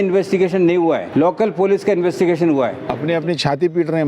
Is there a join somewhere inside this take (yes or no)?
yes